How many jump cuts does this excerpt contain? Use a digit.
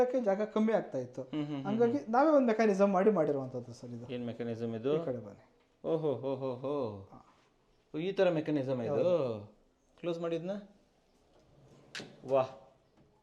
0